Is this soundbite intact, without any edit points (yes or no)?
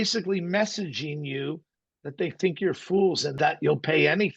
no